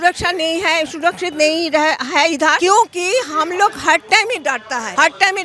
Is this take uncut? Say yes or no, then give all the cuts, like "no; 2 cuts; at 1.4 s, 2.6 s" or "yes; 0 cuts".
yes; 0 cuts